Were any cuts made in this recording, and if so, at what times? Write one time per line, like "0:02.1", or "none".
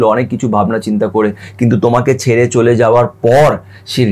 none

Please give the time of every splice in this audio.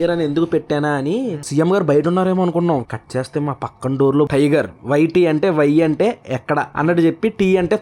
0:01.4
0:02.8
0:04.3

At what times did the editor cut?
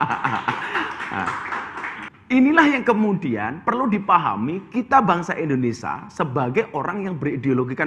0:02.0

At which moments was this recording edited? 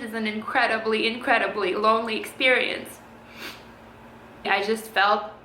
0:04.5

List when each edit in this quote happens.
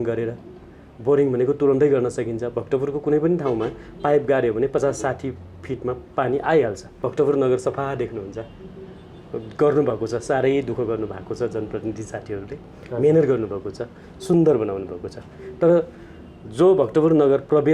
0:07.0

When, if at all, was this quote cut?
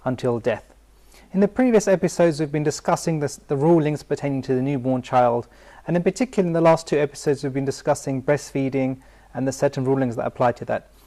0:03.9

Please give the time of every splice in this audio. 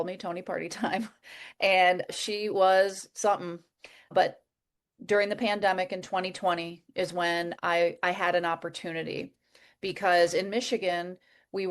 0:02.1
0:04.1

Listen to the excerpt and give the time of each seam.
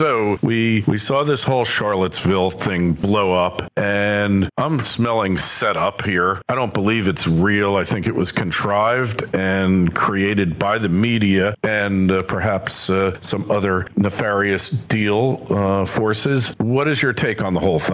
0:05.9

